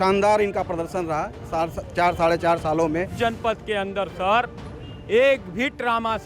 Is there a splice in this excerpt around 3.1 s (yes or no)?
yes